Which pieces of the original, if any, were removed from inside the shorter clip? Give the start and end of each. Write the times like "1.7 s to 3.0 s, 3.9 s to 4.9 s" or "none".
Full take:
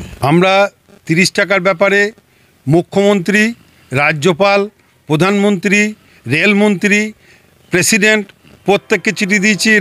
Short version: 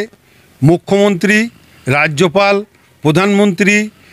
none